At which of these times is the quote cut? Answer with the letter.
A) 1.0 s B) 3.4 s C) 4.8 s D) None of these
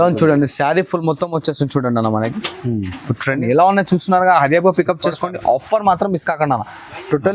B